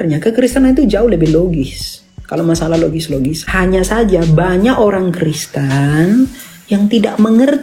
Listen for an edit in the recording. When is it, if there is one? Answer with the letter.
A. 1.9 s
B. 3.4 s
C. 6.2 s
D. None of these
B